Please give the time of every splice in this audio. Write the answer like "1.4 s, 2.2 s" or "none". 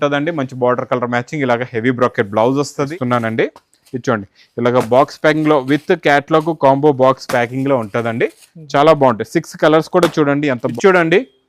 2.9 s, 10.7 s